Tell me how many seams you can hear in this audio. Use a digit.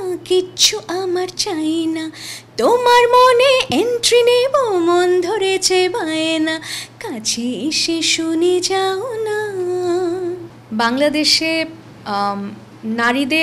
1